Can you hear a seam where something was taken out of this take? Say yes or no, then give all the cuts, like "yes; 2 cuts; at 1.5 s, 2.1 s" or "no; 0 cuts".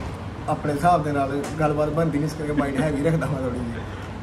no; 0 cuts